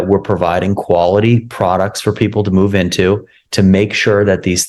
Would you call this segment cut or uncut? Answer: uncut